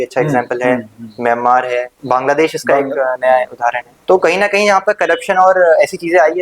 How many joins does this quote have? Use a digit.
2